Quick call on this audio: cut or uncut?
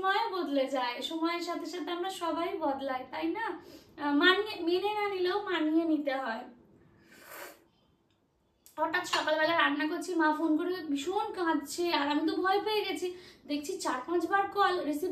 uncut